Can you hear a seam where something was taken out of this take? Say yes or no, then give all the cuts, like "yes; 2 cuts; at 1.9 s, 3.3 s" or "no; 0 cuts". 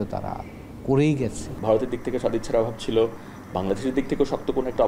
yes; 1 cut; at 1.6 s